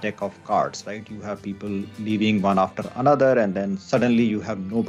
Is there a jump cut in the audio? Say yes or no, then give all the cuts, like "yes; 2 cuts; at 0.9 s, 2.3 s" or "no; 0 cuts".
no; 0 cuts